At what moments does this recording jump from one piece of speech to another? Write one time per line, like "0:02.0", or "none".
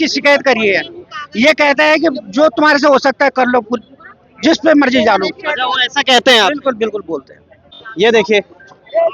0:07.8